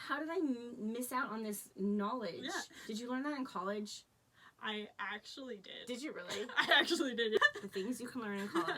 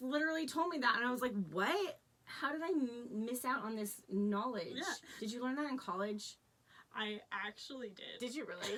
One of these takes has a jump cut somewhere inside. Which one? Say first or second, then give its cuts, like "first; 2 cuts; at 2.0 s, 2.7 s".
first; 1 cut; at 7.4 s